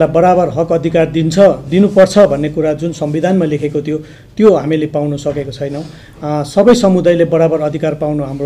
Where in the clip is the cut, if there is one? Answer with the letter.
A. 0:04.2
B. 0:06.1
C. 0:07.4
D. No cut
D